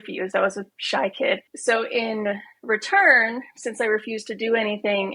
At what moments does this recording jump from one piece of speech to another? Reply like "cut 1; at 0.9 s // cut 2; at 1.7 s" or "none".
none